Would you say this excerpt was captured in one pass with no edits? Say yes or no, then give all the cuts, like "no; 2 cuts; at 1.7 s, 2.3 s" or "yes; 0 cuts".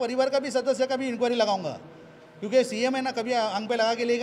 yes; 0 cuts